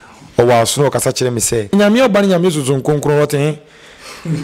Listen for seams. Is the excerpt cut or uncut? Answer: cut